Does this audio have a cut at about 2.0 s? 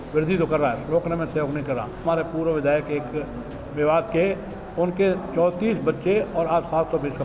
yes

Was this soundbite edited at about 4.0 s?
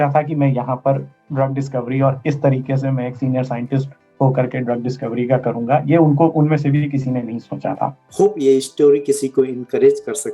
no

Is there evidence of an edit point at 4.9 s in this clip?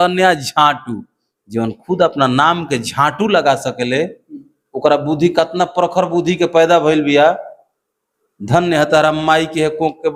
no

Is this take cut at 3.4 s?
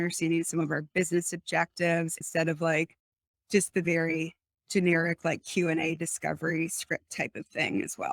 no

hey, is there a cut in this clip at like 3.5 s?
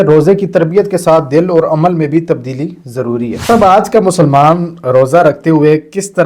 yes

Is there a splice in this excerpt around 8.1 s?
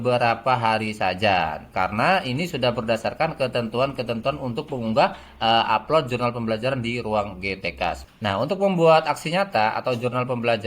yes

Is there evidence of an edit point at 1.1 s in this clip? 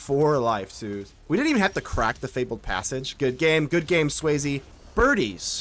yes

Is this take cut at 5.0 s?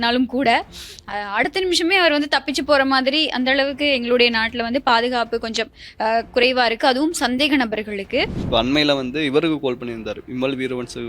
no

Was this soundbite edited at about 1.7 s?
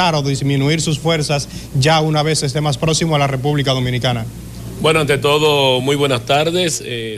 yes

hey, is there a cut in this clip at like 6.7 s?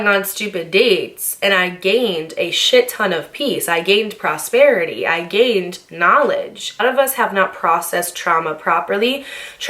yes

